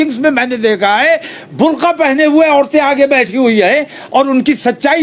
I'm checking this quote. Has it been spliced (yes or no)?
no